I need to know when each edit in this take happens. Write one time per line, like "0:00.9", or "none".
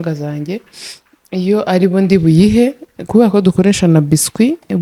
none

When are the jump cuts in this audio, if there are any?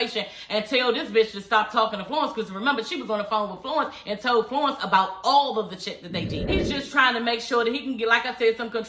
0:06.5

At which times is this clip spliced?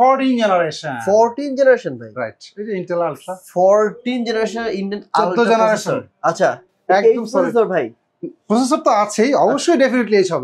none

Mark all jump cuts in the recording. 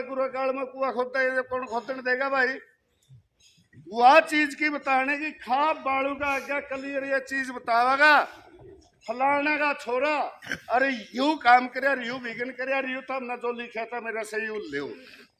none

